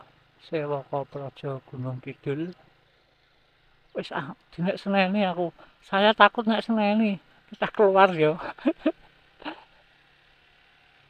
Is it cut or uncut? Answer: uncut